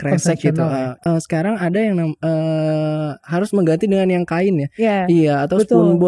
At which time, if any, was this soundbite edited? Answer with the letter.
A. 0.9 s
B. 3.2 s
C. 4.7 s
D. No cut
A